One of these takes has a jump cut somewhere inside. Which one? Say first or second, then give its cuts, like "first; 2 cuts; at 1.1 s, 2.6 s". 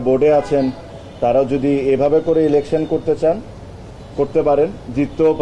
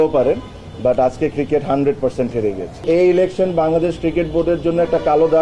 second; 1 cut; at 2.8 s